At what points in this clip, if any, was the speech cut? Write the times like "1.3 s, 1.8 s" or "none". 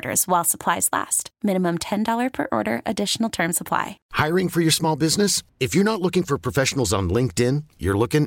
4.0 s